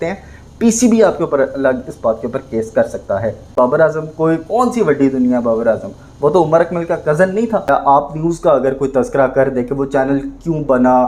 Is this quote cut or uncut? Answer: cut